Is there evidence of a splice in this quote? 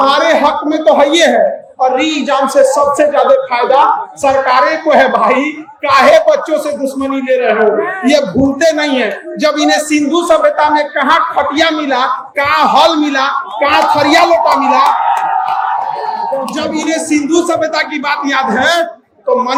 no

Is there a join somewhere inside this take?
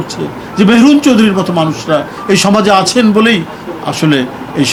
no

